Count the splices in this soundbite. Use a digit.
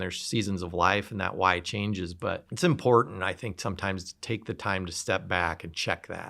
1